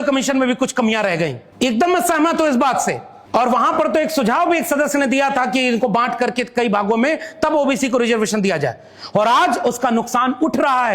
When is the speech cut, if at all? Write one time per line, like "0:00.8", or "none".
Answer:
0:01.4
0:03.1